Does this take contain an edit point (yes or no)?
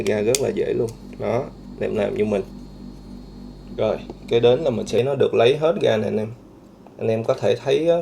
yes